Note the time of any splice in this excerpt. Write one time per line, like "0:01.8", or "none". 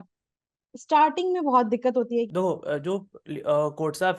0:02.3